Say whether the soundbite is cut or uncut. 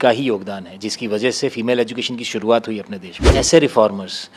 cut